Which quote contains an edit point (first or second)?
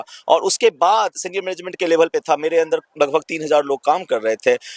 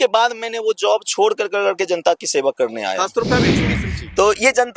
second